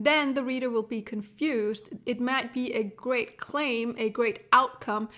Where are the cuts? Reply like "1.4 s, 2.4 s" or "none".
none